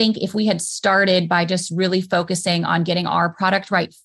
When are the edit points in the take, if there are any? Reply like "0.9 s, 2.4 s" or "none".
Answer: none